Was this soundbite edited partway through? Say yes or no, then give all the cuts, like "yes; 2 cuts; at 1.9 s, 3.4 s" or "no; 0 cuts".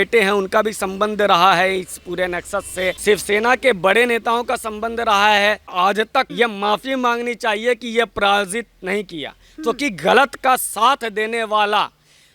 yes; 2 cuts; at 3.0 s, 5.7 s